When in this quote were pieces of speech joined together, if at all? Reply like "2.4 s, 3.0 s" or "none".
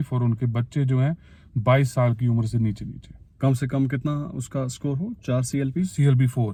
none